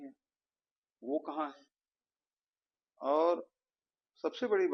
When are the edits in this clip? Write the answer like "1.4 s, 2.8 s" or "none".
none